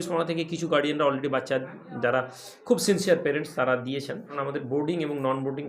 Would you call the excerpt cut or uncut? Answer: cut